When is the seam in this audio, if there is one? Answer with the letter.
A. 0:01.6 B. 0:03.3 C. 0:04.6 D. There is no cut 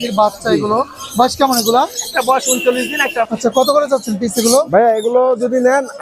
B